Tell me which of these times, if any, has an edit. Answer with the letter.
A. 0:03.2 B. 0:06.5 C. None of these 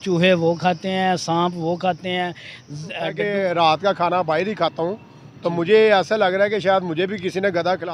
A